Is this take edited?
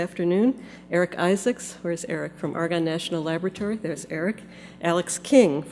yes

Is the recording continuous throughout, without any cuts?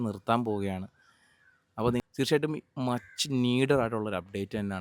no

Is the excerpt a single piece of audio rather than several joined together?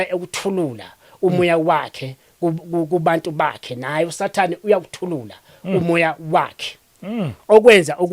yes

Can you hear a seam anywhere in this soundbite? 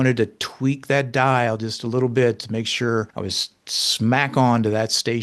yes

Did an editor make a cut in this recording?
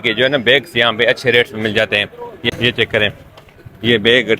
yes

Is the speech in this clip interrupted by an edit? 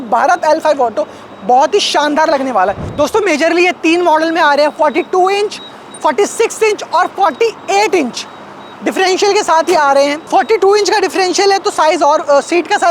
no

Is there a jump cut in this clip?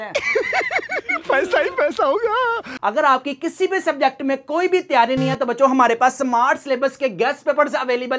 no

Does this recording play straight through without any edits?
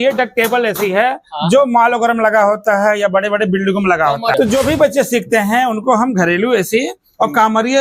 no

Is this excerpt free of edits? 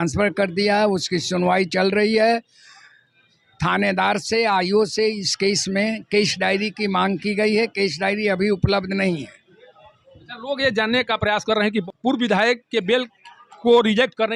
yes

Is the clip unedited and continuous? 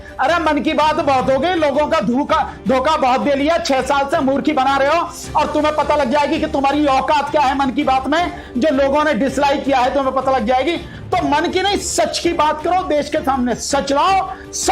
yes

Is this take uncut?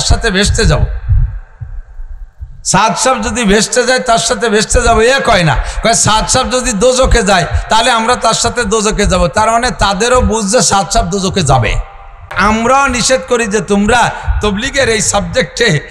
yes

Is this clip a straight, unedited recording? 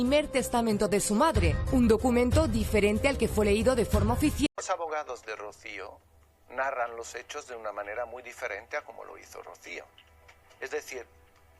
no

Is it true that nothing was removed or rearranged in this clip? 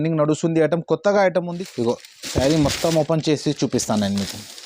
no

